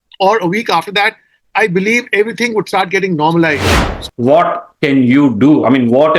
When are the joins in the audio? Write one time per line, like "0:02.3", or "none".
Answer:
0:04.1